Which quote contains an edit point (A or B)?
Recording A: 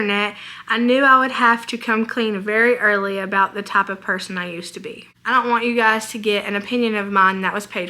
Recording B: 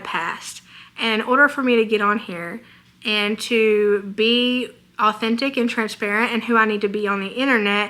A